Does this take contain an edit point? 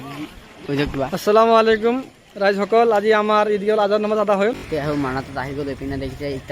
yes; 1 cut; at 4.7 s

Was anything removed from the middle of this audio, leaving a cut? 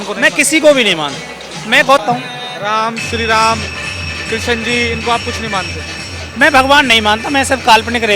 yes; 1 cut; at 2.0 s

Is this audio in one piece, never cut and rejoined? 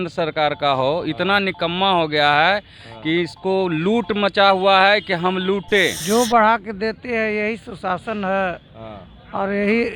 no; 1 cut; at 6.0 s

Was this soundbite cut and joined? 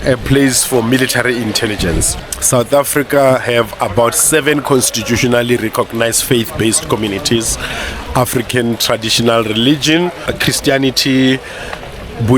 yes; 2 cuts; at 2.1 s, 10.2 s

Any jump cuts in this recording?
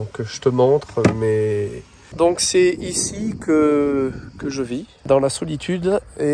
yes; 2 cuts; at 2.1 s, 4.9 s

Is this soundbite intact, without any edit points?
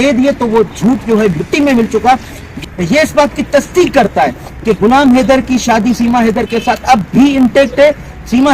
no; 1 cut; at 2.0 s

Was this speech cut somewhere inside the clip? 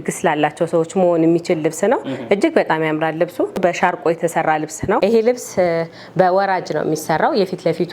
yes; 2 cuts; at 3.7 s, 5.0 s

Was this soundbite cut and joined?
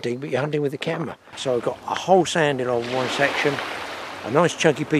yes; 1 cut; at 1.2 s

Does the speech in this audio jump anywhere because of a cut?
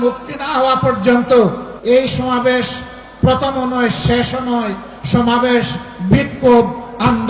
yes; 1 cut; at 1.7 s

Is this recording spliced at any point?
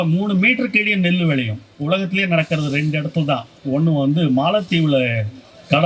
no; 0 cuts

